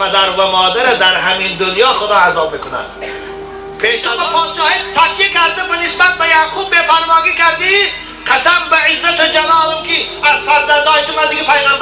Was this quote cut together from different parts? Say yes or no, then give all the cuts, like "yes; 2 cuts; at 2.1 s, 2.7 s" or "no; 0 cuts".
yes; 1 cut; at 4.1 s